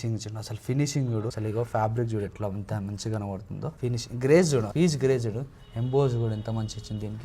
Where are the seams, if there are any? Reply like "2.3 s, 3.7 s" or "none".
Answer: 1.4 s, 3.8 s